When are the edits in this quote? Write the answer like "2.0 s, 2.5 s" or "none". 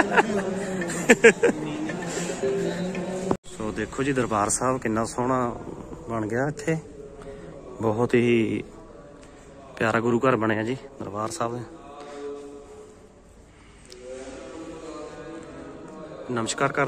3.5 s